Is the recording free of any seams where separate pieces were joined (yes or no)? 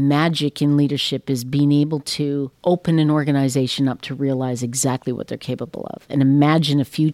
no